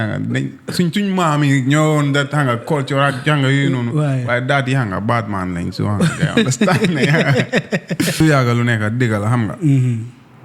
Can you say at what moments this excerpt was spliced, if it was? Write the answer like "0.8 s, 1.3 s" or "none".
8.2 s